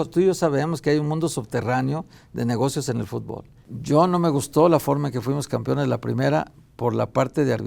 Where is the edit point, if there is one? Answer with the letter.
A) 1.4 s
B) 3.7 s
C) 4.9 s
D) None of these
B